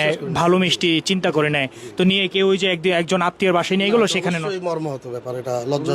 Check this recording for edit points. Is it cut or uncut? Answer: uncut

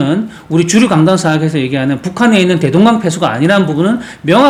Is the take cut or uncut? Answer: uncut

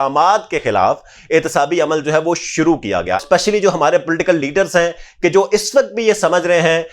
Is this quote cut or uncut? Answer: cut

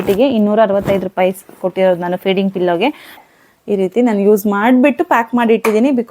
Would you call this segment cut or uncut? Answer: cut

